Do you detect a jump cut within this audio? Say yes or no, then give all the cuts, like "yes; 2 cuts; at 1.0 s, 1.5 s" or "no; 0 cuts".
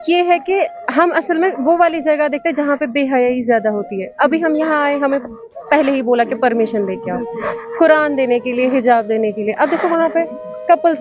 no; 0 cuts